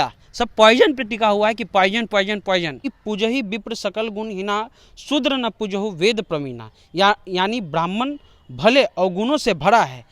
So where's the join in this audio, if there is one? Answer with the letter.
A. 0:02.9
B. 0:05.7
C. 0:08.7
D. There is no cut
A